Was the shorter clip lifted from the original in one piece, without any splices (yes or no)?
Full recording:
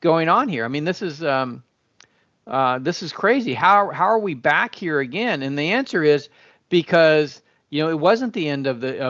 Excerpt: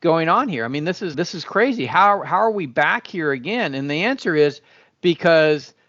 no